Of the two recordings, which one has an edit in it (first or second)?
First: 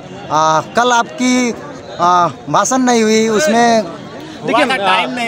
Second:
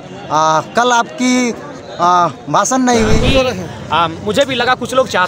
second